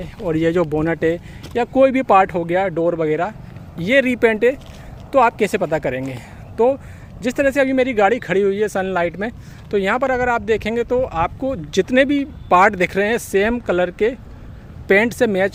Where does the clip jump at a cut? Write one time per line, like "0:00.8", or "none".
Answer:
none